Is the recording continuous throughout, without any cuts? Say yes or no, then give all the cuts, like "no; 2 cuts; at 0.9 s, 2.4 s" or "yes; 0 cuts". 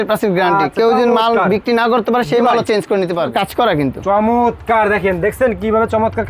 no; 1 cut; at 3.3 s